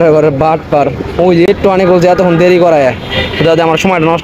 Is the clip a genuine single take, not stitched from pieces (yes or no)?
no